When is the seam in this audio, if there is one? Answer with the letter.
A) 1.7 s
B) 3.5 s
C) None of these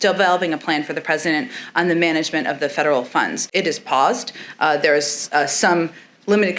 B